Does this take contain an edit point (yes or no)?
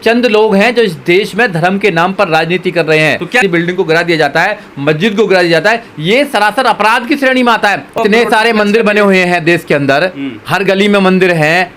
yes